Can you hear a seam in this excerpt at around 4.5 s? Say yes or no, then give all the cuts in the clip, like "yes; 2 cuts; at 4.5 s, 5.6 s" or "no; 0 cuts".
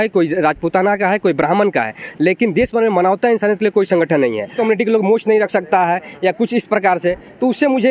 yes; 1 cut; at 4.5 s